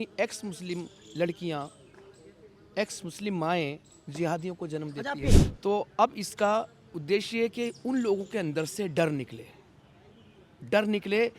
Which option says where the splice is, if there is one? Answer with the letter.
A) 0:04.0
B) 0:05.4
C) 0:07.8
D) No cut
B